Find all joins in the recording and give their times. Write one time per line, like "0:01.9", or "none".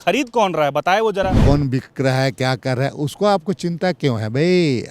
0:01.4

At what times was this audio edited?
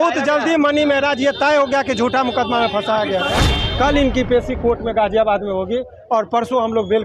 0:03.6

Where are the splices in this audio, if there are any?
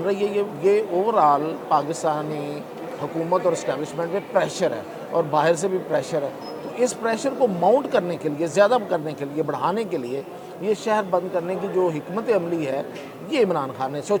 none

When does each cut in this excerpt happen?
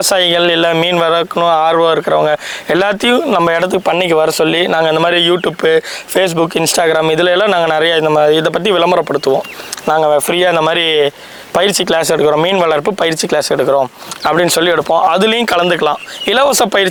none

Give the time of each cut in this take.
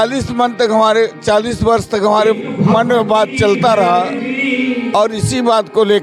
none

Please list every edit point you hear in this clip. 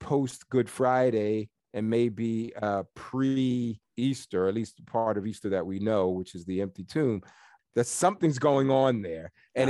0:01.6
0:03.8
0:07.5

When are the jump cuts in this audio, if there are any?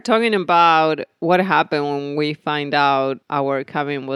0:03.2

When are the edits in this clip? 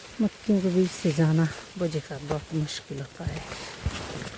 none

